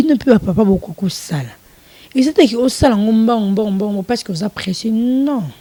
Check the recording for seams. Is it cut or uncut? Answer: uncut